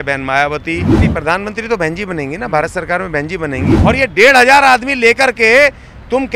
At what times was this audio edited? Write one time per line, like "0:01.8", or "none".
0:00.9
0:03.7